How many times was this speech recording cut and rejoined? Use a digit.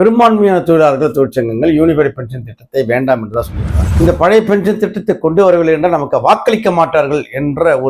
1